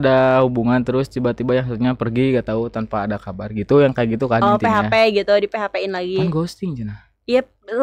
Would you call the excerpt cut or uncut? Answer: uncut